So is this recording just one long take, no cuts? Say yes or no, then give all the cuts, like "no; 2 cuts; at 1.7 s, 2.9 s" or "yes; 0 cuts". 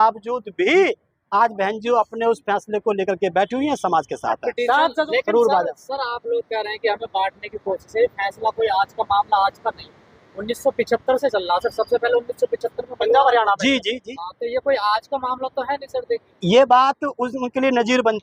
no; 1 cut; at 5.0 s